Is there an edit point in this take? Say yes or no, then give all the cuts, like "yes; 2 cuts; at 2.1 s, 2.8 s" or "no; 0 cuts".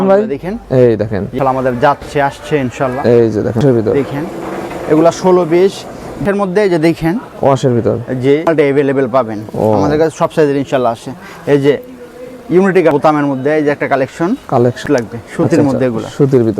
yes; 5 cuts; at 1.3 s, 3.6 s, 8.5 s, 12.9 s, 14.8 s